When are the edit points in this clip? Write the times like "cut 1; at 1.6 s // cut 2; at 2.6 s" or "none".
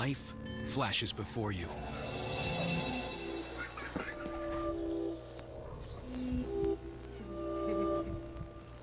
none